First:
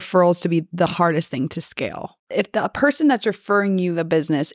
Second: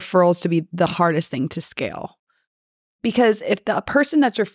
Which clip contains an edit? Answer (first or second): first